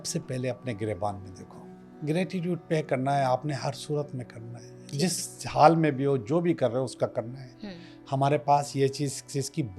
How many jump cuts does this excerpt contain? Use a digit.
1